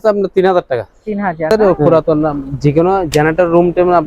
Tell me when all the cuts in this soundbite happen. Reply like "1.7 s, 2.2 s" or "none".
1.5 s